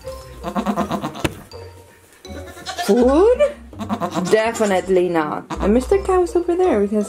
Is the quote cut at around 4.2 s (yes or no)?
no